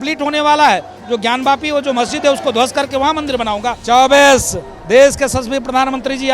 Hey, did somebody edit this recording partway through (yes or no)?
yes